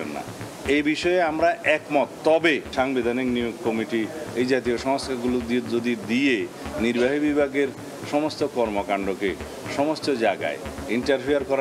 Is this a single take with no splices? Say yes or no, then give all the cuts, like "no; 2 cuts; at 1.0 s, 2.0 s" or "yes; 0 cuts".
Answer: no; 1 cut; at 2.7 s